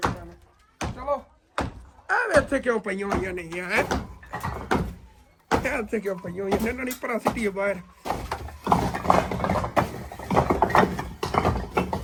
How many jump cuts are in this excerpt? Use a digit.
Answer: 0